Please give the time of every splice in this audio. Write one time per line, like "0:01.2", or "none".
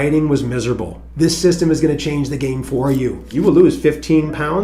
0:01.0
0:03.2